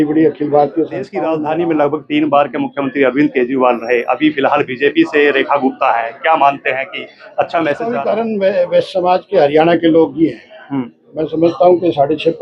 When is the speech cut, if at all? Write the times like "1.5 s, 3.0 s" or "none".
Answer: 1.2 s, 7.9 s